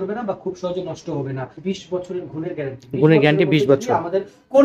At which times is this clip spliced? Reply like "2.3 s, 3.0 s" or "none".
1.6 s